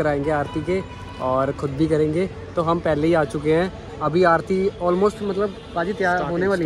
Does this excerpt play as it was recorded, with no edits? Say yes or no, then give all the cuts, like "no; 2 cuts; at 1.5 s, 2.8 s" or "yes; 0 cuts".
yes; 0 cuts